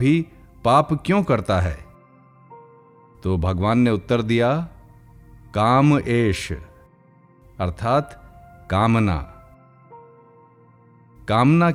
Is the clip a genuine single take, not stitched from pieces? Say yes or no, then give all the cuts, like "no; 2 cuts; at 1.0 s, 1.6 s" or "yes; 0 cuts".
yes; 0 cuts